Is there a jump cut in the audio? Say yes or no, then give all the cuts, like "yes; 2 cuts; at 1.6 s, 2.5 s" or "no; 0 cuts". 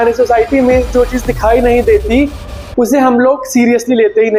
no; 0 cuts